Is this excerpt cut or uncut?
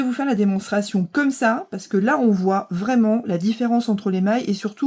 uncut